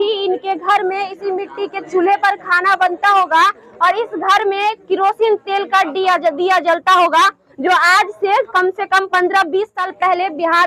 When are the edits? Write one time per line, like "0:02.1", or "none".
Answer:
none